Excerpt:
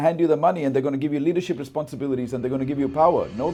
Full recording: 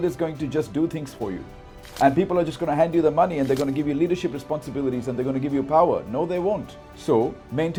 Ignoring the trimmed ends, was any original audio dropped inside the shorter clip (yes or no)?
no